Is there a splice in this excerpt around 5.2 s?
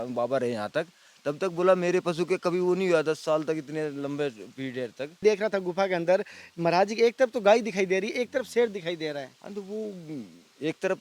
yes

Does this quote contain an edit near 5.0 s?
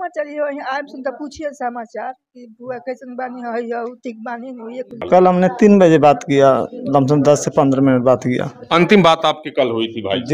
yes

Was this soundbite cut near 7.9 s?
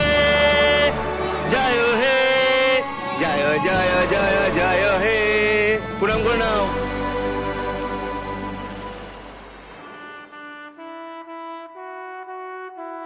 no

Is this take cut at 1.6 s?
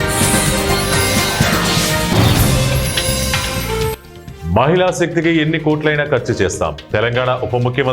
yes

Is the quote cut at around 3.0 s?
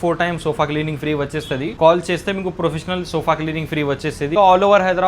no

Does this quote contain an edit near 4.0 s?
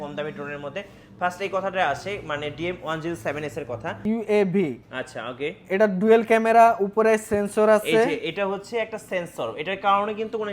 yes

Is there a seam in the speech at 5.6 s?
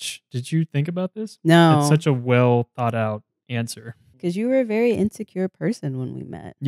no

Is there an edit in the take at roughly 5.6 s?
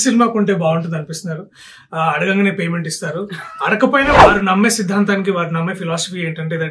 no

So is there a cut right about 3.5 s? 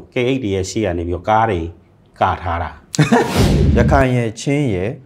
yes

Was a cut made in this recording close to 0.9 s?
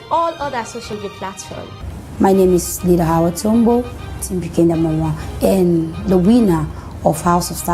yes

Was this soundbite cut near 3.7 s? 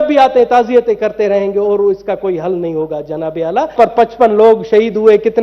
yes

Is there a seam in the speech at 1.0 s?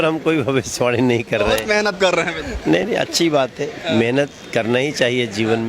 no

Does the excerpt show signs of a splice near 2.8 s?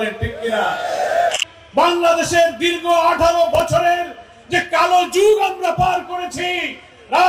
no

